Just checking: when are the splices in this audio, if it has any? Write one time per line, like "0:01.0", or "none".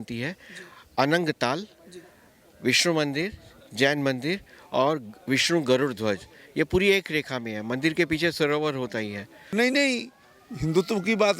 0:09.5